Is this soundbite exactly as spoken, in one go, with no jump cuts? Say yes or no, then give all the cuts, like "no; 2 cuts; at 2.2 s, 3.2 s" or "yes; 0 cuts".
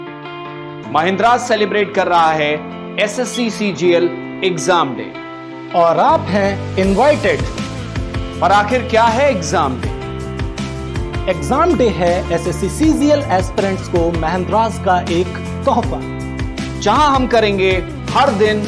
yes; 0 cuts